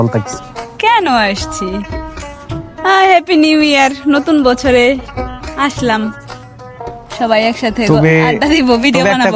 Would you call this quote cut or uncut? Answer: uncut